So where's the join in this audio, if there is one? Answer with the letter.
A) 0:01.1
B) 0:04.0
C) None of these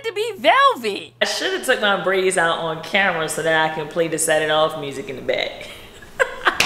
A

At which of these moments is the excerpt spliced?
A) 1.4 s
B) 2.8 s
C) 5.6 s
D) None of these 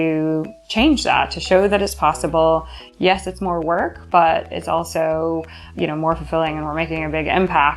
C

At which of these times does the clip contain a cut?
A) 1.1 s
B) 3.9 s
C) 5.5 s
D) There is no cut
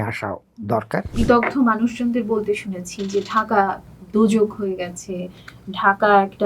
A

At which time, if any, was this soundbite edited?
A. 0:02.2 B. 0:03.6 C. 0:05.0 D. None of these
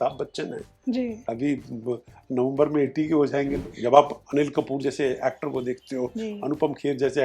B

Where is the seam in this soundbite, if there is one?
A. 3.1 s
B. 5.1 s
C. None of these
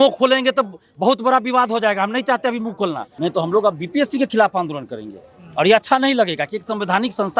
A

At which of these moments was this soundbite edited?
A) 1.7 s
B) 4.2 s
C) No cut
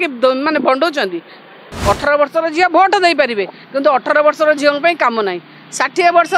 A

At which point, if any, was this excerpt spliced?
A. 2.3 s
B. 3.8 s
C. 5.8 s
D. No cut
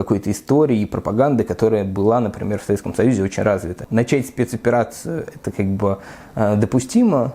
B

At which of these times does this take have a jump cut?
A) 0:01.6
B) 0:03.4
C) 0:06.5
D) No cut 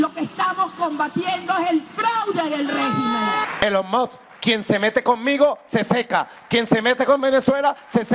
B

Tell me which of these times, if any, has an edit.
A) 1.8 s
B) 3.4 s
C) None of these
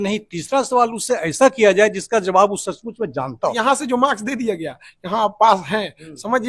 B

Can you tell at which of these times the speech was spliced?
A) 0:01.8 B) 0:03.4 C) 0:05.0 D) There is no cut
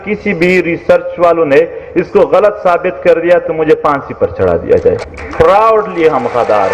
C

